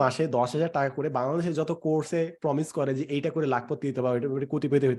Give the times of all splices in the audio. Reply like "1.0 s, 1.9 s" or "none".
none